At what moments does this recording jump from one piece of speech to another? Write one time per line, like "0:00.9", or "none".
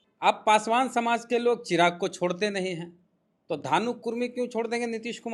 none

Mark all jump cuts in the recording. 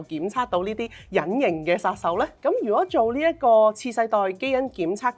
0:02.3

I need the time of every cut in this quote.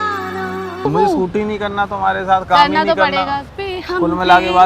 0:00.8
0:03.5

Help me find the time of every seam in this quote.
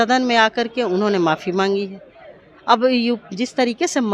none

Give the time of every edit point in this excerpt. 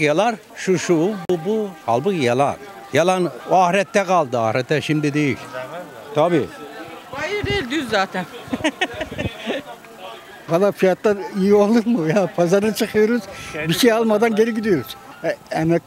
none

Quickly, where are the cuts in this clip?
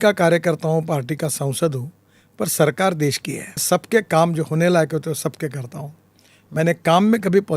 0:03.6

